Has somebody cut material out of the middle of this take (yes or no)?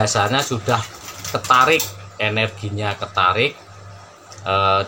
no